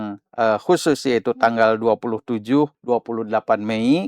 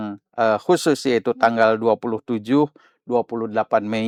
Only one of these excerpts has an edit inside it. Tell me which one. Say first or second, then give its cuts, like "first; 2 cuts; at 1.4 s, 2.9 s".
first; 1 cut; at 2.8 s